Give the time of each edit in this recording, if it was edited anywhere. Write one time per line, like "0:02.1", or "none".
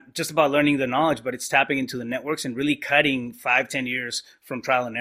none